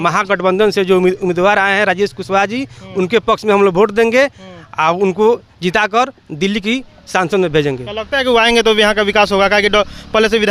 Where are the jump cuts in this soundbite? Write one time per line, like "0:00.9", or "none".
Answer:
none